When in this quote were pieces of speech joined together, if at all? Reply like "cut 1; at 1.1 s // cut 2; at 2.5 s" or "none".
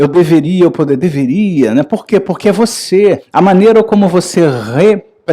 cut 1; at 3.2 s